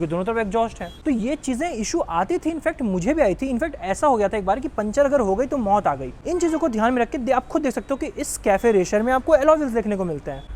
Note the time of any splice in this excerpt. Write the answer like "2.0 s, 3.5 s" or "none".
none

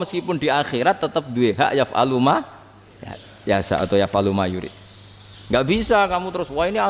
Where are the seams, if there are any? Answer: none

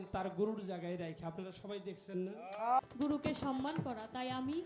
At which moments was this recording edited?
2.8 s

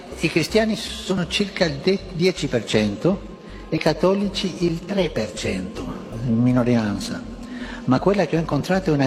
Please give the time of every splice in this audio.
none

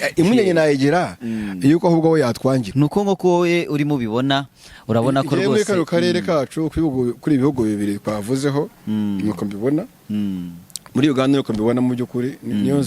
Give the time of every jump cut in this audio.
2.7 s

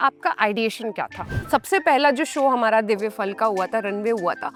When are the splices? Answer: none

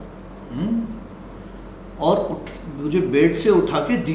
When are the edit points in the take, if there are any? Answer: none

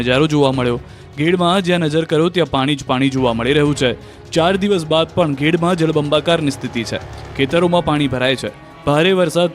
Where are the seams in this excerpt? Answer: 4.4 s

